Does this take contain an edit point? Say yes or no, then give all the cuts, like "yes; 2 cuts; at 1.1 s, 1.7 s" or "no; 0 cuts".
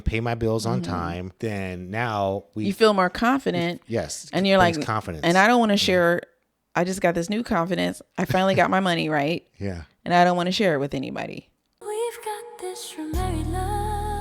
yes; 1 cut; at 11.9 s